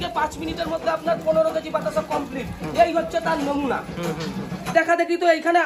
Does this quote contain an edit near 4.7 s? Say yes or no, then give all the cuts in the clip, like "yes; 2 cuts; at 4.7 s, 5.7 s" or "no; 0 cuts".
yes; 1 cut; at 4.7 s